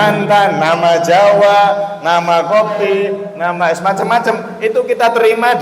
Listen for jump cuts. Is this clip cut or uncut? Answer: cut